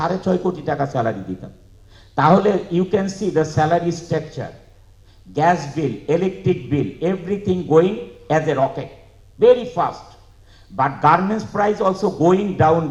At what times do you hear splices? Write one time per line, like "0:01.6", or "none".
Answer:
none